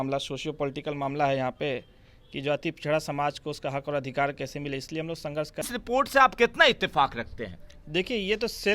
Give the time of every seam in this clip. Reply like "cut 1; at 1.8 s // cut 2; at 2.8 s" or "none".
cut 1; at 5.7 s